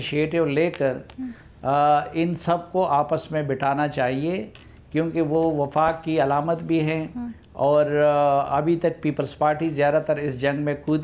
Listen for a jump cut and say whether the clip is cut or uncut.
uncut